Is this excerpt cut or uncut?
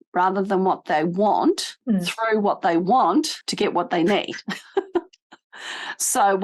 uncut